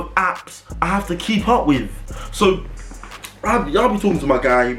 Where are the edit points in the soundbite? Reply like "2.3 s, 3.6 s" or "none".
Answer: none